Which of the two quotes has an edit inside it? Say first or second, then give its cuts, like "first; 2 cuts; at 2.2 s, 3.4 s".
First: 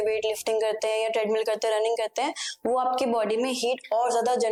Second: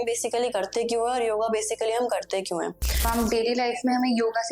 second; 1 cut; at 3.0 s